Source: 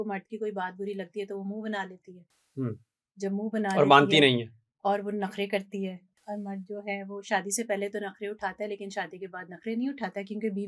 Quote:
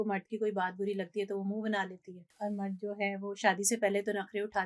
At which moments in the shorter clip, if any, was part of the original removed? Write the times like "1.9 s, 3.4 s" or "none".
2.2 s